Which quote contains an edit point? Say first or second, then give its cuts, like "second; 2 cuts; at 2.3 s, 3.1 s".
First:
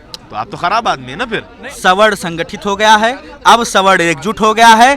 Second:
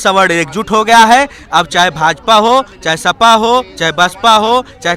first; 1 cut; at 1.6 s